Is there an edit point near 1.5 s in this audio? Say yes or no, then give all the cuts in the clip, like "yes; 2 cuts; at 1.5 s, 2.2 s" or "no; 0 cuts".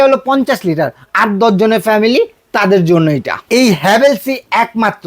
no; 1 cut; at 3.3 s